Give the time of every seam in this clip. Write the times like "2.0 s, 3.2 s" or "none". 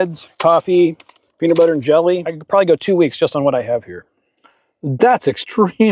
2.3 s